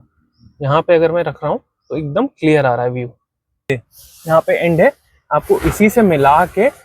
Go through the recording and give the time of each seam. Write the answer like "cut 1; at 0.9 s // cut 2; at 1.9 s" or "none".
cut 1; at 3.7 s